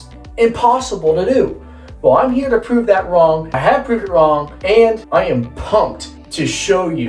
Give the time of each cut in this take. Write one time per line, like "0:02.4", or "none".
none